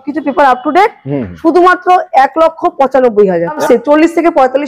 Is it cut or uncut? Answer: cut